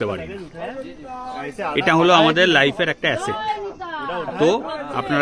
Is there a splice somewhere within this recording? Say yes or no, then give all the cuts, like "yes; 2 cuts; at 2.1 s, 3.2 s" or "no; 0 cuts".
no; 0 cuts